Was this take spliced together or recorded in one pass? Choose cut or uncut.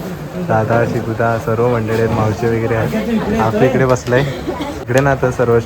cut